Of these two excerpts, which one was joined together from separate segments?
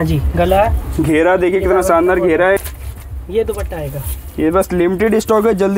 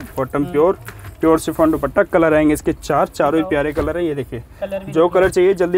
first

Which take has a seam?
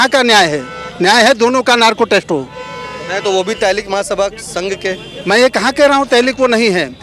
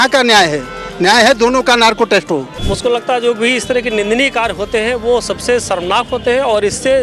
second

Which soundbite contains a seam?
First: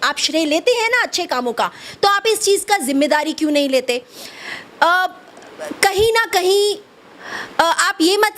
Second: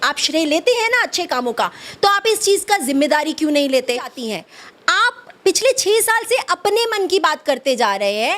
second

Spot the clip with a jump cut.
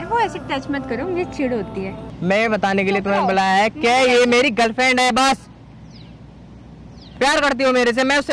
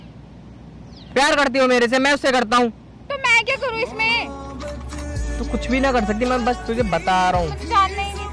first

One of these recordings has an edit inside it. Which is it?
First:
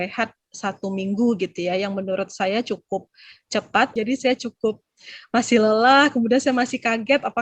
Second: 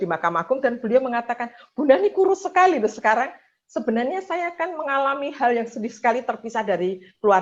first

